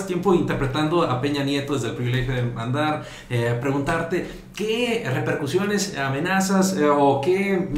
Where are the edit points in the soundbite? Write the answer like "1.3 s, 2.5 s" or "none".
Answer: none